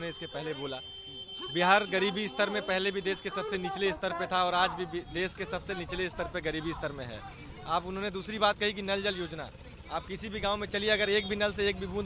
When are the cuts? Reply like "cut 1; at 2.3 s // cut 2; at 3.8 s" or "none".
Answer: none